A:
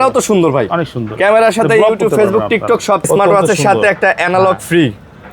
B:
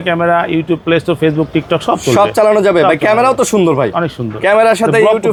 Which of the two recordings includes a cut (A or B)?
A